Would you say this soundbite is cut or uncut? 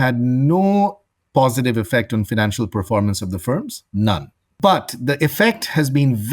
cut